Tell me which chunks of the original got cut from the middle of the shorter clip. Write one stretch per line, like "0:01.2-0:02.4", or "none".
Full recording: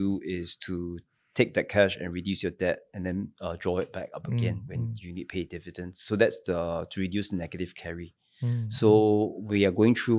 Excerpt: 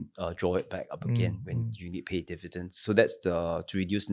none